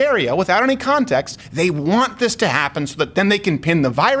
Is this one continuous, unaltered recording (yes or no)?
no